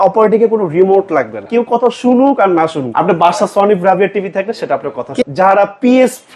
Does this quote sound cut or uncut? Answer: cut